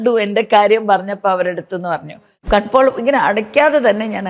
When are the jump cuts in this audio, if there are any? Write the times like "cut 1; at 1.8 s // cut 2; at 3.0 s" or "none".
cut 1; at 2.4 s